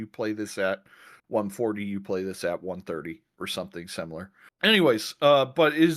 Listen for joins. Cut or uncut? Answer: uncut